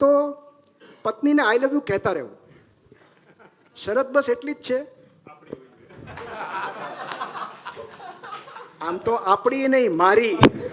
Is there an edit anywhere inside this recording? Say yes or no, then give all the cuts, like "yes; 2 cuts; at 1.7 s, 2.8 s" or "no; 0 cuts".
no; 0 cuts